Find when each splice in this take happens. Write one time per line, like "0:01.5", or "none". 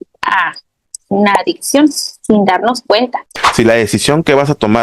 0:03.2